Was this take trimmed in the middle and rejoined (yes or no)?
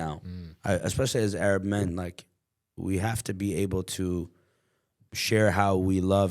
no